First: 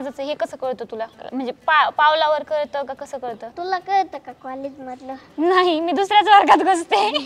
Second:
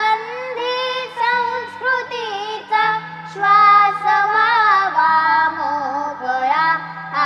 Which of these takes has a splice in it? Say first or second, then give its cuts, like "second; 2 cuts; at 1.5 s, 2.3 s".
first; 2 cuts; at 1.2 s, 3.5 s